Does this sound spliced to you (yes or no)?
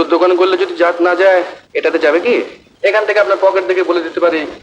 yes